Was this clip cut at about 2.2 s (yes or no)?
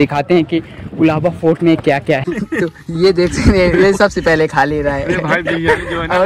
yes